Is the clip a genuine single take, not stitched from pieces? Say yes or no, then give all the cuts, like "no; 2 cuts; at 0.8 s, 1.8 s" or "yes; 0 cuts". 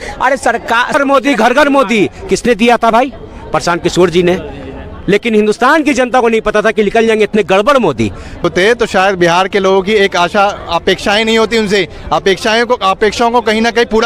no; 2 cuts; at 0.9 s, 8.4 s